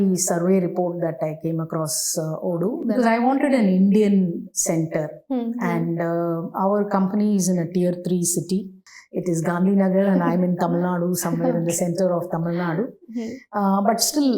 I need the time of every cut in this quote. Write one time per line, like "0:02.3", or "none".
0:02.8
0:08.8